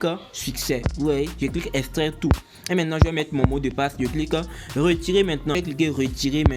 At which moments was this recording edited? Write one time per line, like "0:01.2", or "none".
0:05.6